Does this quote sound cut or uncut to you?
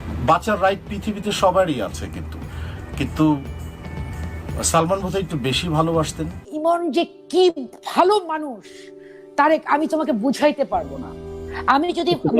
cut